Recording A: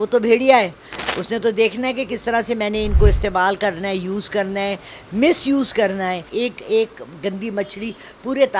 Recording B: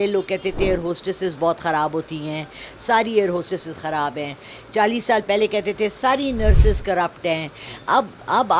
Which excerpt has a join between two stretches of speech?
A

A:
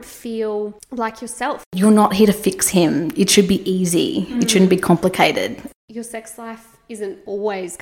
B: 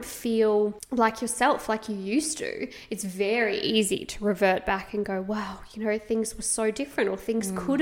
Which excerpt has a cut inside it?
A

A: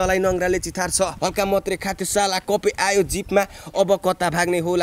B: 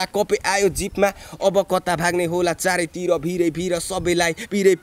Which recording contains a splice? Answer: A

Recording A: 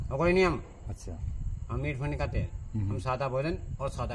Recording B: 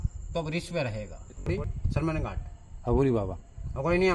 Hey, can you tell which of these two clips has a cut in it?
B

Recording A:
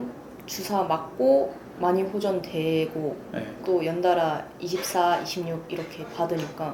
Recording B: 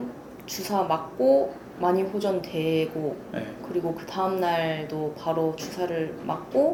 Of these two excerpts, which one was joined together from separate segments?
A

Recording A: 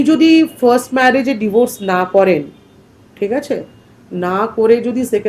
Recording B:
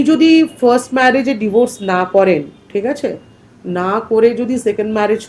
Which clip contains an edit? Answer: B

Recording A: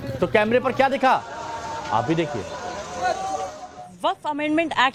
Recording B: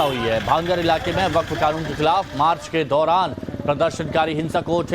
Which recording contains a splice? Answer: B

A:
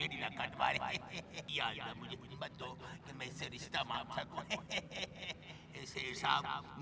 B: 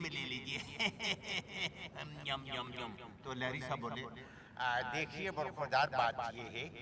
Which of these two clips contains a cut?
A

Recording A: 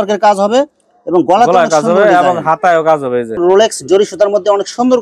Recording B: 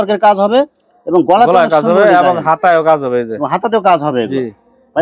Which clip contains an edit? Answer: A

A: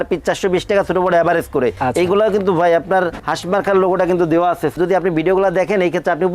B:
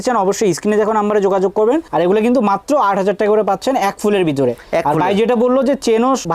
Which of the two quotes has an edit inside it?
A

